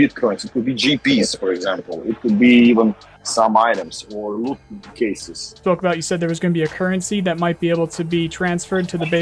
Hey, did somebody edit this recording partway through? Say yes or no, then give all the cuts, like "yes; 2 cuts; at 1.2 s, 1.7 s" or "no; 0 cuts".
yes; 1 cut; at 5.5 s